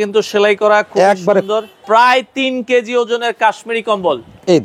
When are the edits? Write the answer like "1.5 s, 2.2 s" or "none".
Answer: 1.8 s